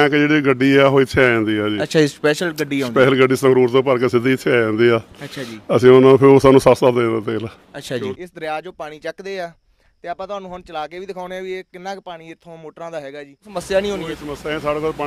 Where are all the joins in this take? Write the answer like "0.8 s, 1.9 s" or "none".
8.2 s, 13.5 s